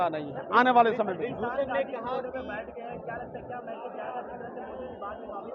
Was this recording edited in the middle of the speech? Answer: no; 0 cuts

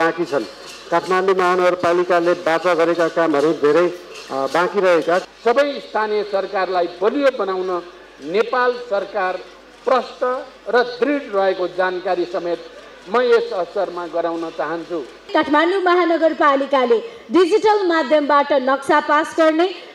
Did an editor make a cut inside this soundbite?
yes; 2 cuts; at 5.3 s, 15.3 s

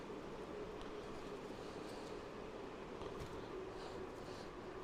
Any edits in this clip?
no; 0 cuts

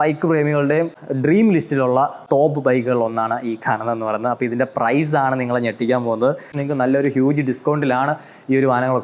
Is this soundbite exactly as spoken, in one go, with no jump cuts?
no; 3 cuts; at 1.0 s, 2.2 s, 6.5 s

